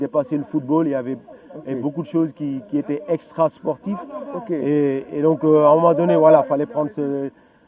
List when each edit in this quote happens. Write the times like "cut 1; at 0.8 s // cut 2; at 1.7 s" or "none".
none